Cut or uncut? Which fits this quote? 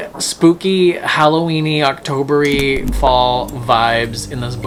uncut